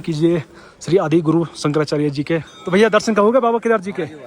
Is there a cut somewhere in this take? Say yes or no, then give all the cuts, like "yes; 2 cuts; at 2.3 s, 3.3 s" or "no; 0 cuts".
yes; 1 cut; at 2.5 s